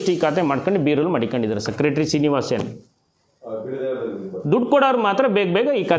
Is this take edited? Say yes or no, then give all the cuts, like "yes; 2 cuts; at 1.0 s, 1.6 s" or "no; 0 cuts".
no; 0 cuts